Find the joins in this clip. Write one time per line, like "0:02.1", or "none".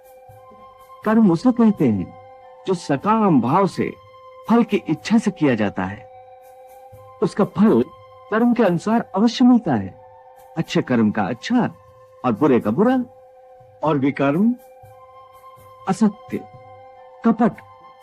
0:01.0